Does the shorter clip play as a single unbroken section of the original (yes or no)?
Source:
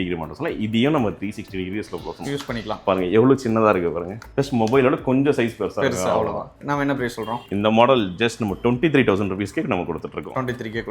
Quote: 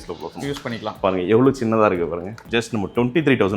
no